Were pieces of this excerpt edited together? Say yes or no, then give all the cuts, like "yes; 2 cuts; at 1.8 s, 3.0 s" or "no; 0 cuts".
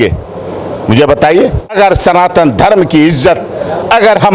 yes; 1 cut; at 1.9 s